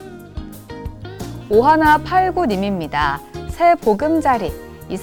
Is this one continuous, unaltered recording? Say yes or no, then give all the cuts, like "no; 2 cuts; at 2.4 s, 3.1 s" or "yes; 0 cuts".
yes; 0 cuts